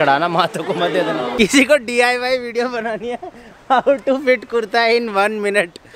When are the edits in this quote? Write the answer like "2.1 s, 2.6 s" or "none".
1.3 s